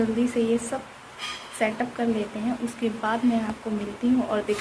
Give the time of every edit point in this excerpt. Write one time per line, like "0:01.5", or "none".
none